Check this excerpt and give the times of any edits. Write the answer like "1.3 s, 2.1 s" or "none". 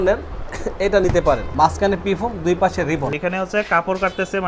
1.5 s, 3.2 s

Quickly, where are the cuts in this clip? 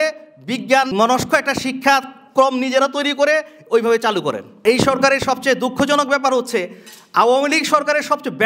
0.9 s, 4.6 s

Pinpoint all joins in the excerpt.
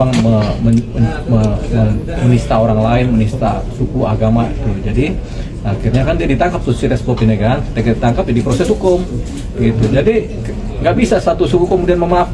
none

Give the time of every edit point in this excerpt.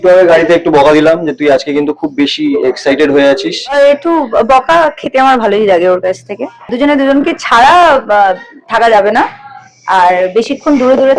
3.8 s, 6.7 s

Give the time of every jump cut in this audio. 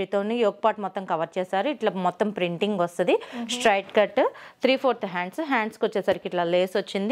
none

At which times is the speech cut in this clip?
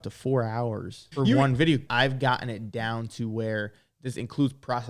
1.0 s, 1.9 s

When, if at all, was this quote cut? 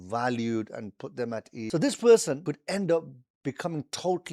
1.7 s, 2.4 s

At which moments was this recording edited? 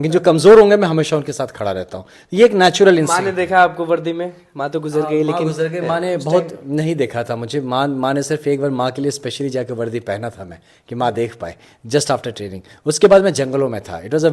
none

